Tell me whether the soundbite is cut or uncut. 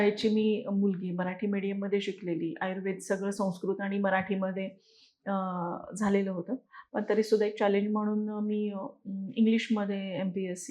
uncut